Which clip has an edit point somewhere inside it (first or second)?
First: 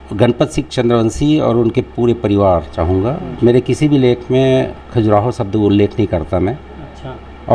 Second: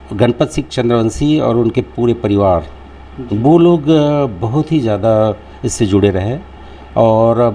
first